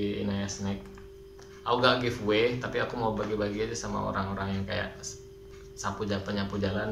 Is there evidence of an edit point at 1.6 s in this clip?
no; 0 cuts

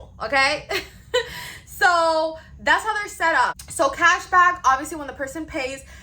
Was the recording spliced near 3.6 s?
yes; 1 cut; at 3.6 s

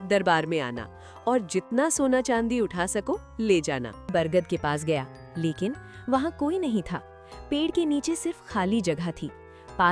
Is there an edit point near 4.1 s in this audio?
yes; 1 cut; at 4.1 s

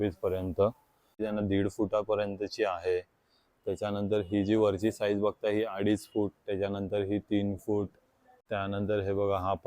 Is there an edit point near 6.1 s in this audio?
no; 2 cuts; at 1.2 s, 8.4 s

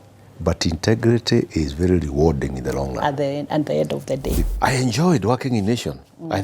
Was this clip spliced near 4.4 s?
yes; 1 cut; at 4.4 s

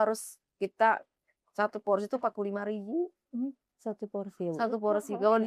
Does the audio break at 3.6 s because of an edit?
no; 0 cuts

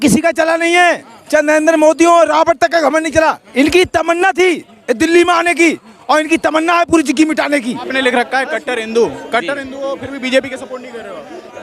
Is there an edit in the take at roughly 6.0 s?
no; 2 cuts; at 3.5 s, 7.8 s

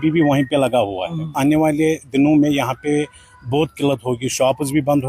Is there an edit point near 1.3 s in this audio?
yes; 1 cut; at 1.3 s

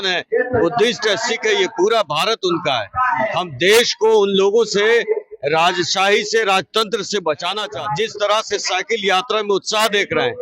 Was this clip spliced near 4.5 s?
no; 1 cut; at 7.6 s

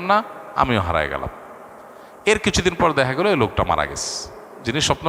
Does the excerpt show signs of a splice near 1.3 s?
no; 0 cuts

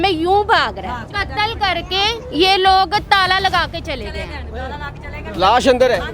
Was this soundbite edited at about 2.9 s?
no; 1 cut; at 1.1 s

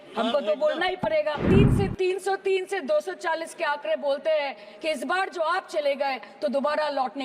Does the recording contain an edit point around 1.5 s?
yes; 1 cut; at 1.5 s

